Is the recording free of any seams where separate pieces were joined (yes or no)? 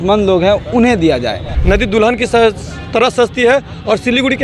no